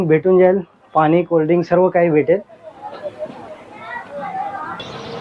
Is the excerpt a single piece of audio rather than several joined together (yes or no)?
yes